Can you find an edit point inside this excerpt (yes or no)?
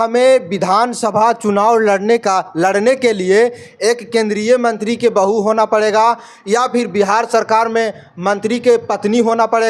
no